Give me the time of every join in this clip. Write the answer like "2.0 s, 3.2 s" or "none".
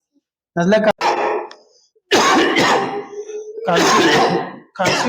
0.9 s